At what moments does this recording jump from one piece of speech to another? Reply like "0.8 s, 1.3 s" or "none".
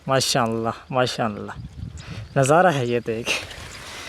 none